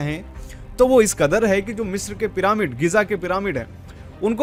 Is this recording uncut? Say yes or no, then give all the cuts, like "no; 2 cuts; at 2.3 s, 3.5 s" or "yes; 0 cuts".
yes; 0 cuts